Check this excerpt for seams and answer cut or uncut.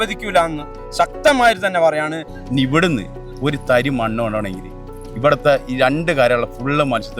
cut